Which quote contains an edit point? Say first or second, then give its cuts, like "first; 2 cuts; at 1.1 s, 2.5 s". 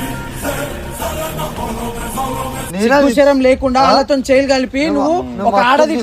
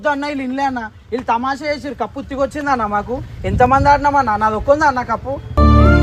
first; 1 cut; at 2.6 s